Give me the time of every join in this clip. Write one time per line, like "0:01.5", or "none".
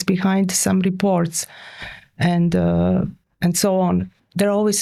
none